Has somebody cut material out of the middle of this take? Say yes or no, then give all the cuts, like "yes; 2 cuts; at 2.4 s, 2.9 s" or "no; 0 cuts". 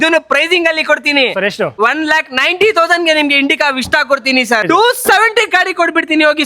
yes; 2 cuts; at 1.7 s, 4.6 s